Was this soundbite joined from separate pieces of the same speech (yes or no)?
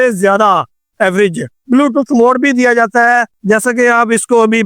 yes